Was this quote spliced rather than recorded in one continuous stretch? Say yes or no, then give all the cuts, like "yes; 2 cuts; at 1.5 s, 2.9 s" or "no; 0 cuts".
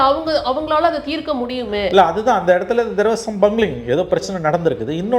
no; 0 cuts